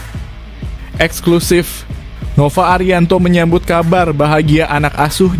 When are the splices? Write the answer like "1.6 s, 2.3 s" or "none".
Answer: 1.0 s